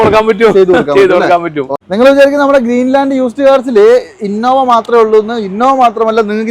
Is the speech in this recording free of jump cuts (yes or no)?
no